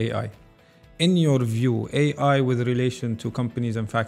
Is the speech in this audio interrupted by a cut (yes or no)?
no